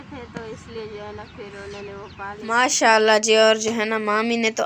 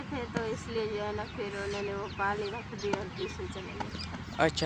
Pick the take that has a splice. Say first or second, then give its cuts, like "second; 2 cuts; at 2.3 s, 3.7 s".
first; 1 cut; at 2.3 s